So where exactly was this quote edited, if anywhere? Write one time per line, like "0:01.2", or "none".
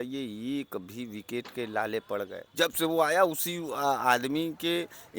0:02.4